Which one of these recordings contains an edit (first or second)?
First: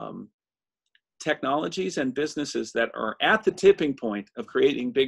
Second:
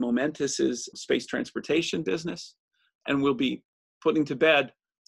second